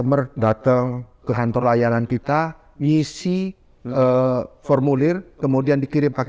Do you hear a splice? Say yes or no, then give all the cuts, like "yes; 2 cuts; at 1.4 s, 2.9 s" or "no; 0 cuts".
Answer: no; 0 cuts